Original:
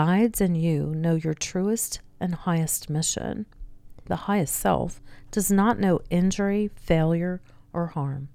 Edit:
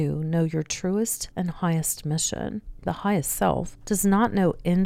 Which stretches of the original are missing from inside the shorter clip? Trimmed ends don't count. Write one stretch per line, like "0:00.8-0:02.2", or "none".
0:01.9-0:02.1
0:03.6-0:03.9
0:05.0-0:05.2